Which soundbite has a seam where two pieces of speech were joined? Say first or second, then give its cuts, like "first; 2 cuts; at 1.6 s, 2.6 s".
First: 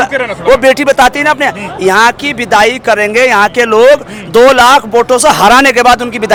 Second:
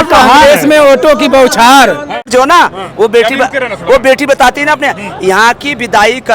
second; 1 cut; at 2.3 s